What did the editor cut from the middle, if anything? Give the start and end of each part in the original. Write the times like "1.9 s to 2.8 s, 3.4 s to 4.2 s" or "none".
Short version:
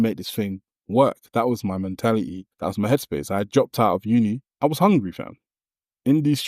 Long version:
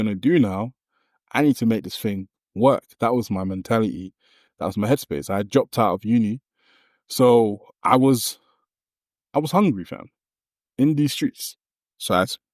4.1 s to 4.4 s, 6.4 s to 9.2 s

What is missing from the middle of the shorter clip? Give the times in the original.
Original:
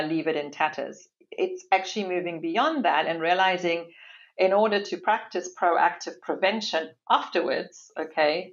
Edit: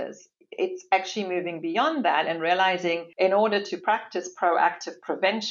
3.9 s to 4.3 s

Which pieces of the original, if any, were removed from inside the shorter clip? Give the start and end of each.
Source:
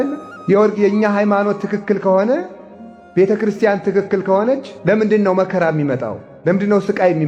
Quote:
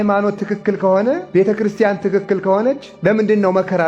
2.5 s to 3.1 s

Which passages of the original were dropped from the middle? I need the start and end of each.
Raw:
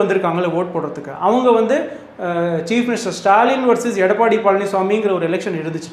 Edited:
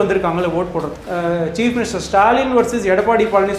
1.0 s to 2.1 s

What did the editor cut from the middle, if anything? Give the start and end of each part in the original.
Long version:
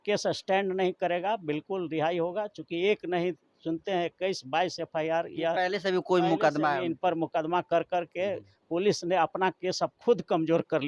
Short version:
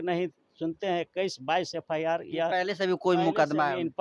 none

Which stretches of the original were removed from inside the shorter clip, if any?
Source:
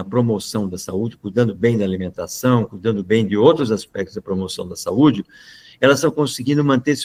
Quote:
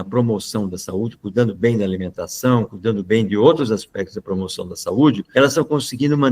5.2 s to 5.7 s

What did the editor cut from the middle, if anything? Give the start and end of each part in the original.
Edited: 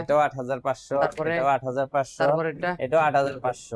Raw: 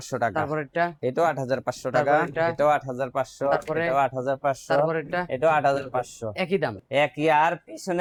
none

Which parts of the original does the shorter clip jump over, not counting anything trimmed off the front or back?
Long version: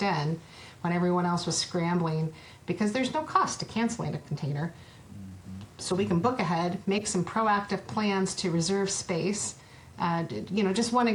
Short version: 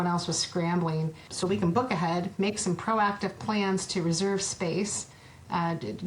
2.4 s to 5.7 s

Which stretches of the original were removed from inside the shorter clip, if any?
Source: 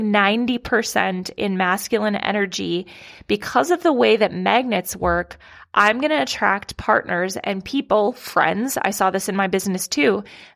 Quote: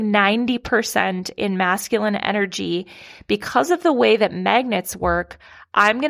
none

